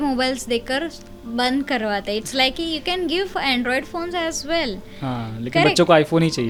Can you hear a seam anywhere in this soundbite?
no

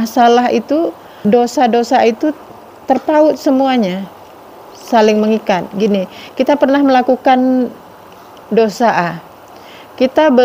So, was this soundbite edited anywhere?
yes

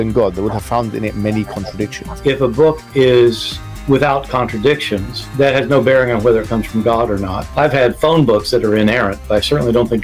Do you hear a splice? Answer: no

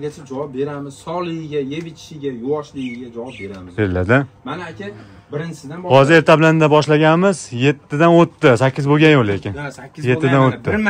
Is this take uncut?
yes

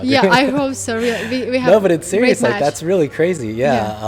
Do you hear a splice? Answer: no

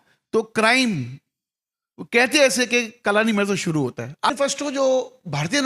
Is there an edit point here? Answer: yes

